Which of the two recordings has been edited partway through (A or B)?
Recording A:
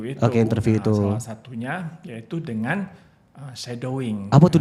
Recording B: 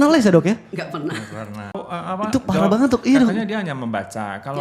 B